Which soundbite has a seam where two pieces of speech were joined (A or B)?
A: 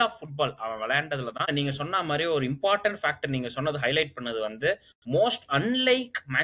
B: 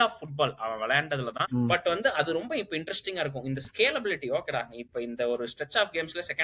B